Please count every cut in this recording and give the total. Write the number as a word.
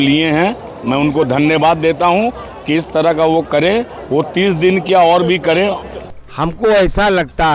zero